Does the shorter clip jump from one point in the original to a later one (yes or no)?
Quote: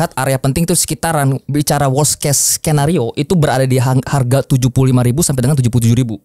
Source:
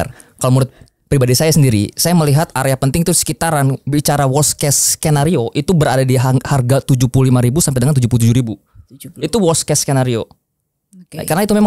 no